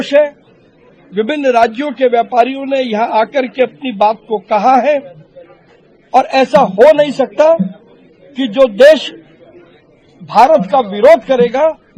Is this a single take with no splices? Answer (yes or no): yes